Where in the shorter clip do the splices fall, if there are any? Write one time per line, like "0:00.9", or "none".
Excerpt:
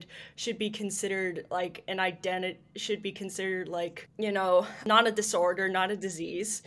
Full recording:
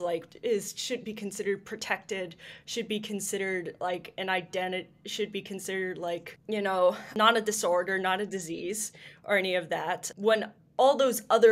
none